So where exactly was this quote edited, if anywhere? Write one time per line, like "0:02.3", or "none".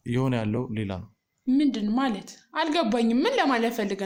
none